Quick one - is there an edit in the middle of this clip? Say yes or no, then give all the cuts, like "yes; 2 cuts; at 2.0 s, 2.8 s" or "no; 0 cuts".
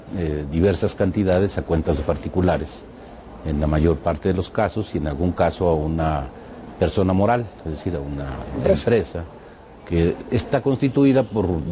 yes; 1 cut; at 2.2 s